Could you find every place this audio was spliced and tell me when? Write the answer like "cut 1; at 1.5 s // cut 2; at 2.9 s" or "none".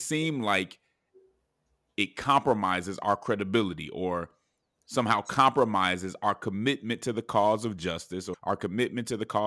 cut 1; at 8.3 s